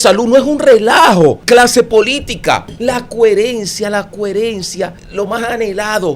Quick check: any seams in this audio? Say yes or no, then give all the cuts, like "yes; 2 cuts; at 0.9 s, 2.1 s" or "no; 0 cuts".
yes; 3 cuts; at 1.4 s, 2.7 s, 5.0 s